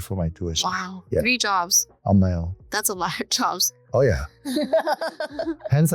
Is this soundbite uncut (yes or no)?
yes